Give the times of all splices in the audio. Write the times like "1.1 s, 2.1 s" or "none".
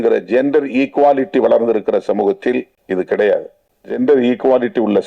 2.8 s, 4.0 s